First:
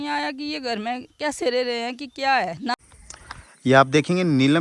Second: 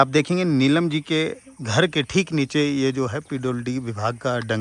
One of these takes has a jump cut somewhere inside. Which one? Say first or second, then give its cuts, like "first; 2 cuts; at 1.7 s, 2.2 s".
first; 1 cut; at 2.9 s